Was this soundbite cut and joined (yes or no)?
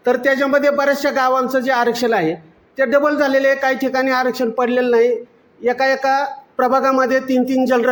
no